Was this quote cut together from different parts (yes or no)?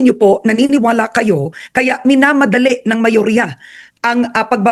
no